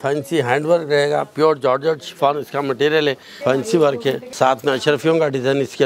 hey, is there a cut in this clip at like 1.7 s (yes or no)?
no